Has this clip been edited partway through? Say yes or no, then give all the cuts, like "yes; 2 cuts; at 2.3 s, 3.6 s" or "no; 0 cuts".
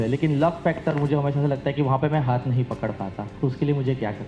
yes; 1 cut; at 3.2 s